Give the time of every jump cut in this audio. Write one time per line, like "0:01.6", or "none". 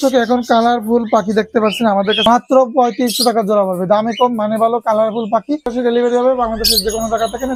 0:02.3
0:05.7